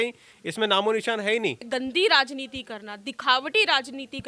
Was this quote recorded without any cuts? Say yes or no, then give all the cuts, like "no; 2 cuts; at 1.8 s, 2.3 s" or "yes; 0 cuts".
no; 1 cut; at 1.6 s